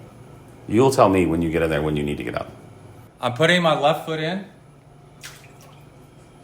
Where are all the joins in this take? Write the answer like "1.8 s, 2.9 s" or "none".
3.0 s